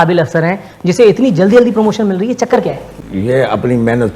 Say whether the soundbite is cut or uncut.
cut